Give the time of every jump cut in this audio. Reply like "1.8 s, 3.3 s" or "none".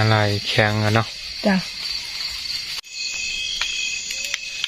2.9 s